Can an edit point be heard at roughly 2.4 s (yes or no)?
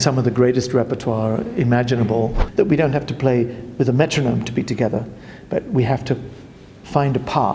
yes